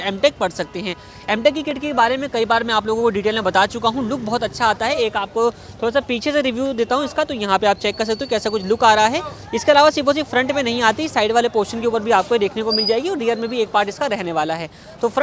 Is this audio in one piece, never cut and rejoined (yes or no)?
yes